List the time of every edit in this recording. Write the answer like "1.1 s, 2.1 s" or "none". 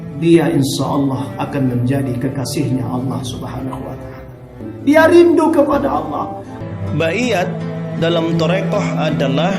4.6 s, 6.5 s